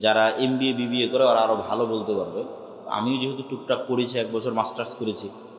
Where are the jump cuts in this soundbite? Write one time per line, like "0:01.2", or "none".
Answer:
none